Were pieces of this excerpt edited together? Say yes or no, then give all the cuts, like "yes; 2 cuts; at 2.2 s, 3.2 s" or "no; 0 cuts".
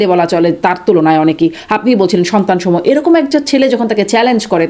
no; 0 cuts